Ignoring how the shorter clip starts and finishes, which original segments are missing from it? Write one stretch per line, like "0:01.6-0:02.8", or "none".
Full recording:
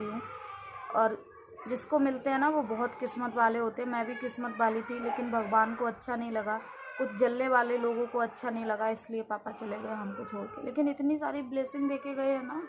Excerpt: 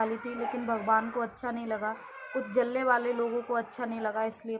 none